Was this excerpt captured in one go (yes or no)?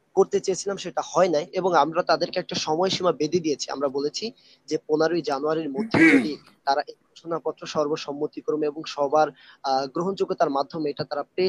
no